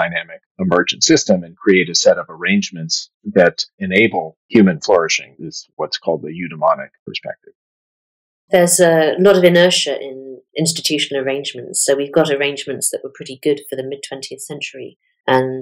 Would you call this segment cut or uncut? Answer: cut